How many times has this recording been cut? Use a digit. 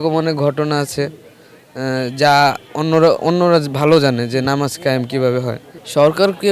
0